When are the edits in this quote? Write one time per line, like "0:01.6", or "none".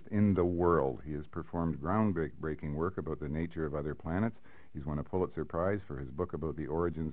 none